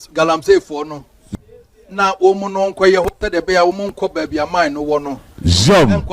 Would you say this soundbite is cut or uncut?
cut